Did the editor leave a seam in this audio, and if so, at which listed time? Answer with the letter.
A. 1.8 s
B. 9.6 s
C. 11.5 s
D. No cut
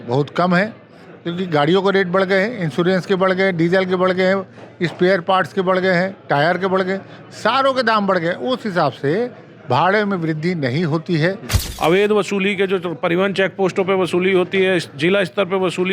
C